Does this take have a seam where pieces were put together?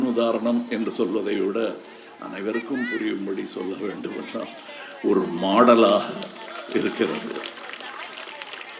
no; 0 cuts

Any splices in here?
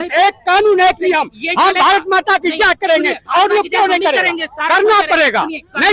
no; 0 cuts

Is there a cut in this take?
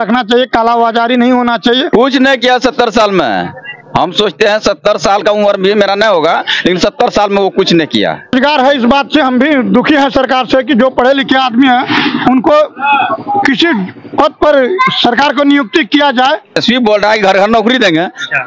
yes; 3 cuts; at 1.9 s, 8.3 s, 16.6 s

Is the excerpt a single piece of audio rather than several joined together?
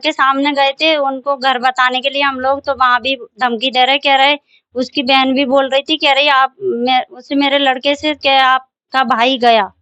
yes; 0 cuts

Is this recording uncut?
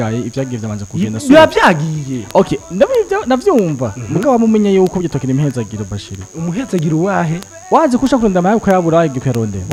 yes; 0 cuts

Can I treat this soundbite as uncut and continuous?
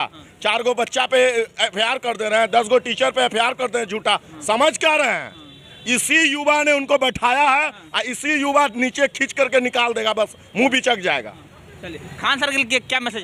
yes; 0 cuts

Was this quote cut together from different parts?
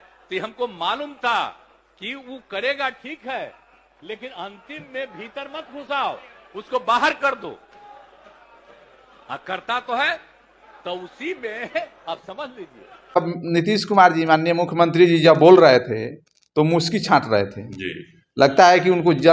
yes; 1 cut; at 13.2 s

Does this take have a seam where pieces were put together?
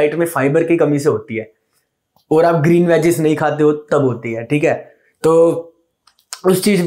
no; 0 cuts

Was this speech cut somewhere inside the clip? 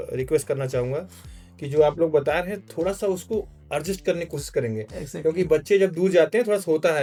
no; 0 cuts

